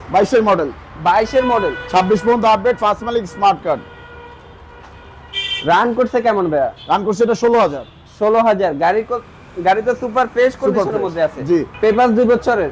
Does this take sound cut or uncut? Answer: uncut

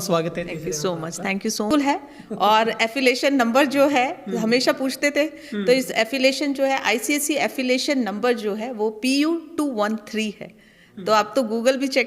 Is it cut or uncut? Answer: cut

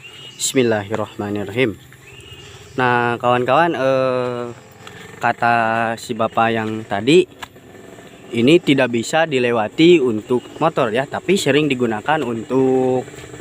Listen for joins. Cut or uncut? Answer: uncut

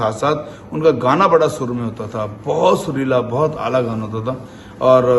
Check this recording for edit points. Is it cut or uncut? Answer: uncut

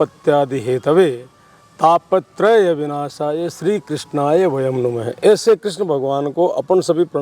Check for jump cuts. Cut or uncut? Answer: uncut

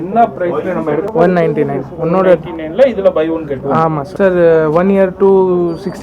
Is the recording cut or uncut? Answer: cut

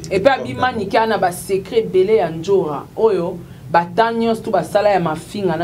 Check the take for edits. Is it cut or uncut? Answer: uncut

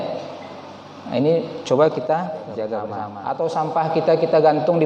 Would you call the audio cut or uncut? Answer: cut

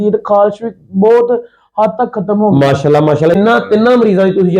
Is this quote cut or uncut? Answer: cut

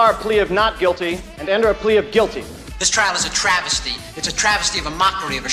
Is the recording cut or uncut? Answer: uncut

